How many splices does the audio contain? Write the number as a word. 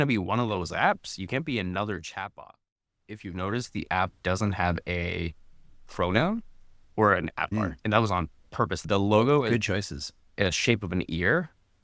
three